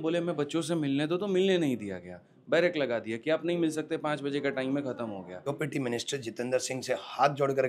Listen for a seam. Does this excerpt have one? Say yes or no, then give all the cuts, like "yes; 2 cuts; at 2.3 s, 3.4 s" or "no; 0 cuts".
yes; 1 cut; at 5.5 s